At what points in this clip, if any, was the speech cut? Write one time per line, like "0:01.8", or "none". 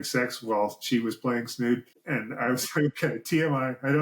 0:01.9